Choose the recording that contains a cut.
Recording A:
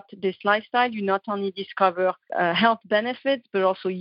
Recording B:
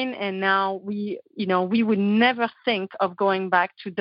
A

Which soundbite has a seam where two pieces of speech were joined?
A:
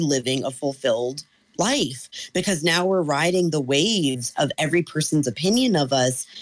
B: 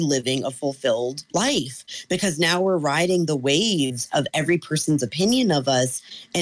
B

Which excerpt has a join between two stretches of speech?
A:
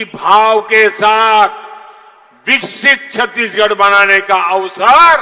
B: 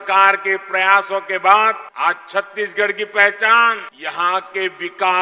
B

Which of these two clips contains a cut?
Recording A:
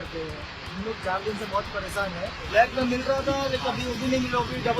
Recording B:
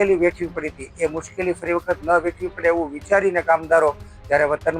A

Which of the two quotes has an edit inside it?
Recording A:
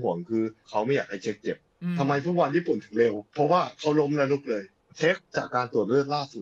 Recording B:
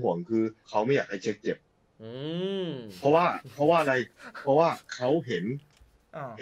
A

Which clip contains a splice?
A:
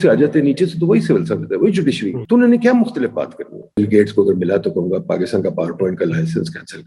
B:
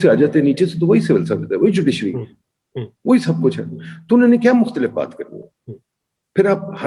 A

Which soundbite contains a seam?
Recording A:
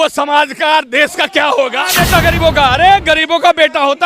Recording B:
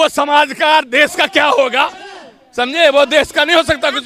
A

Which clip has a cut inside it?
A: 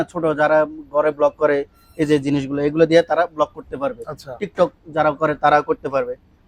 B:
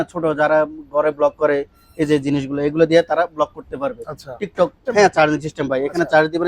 B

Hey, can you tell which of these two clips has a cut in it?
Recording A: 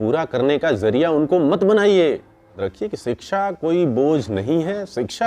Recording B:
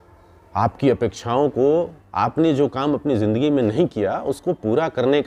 A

